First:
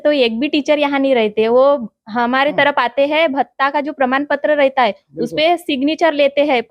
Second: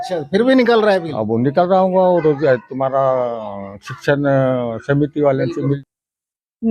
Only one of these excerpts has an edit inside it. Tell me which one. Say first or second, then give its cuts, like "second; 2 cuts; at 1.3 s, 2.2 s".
second; 1 cut; at 5.8 s